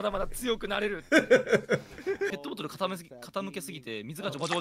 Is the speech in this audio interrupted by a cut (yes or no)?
yes